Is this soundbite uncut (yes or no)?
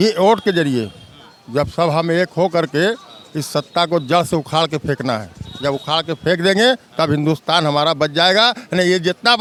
yes